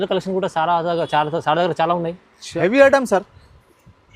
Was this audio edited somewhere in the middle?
yes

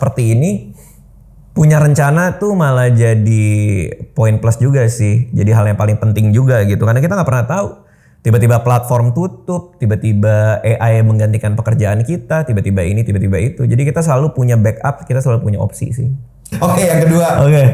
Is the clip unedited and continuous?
no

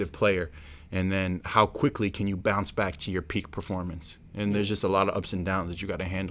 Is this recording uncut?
yes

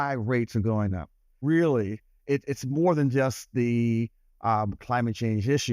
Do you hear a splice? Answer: yes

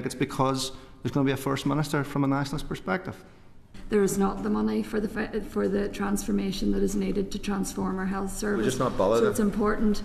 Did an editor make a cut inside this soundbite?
yes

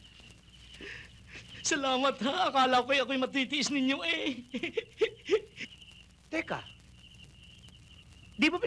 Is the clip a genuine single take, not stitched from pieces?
no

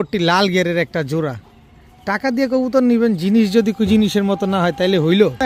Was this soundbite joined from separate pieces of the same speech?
no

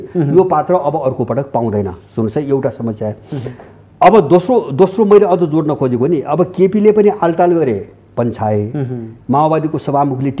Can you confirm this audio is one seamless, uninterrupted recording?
yes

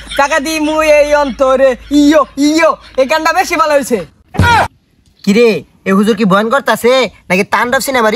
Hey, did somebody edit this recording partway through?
yes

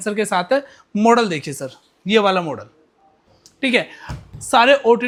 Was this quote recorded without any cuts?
yes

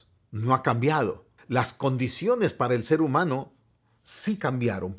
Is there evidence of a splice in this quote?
yes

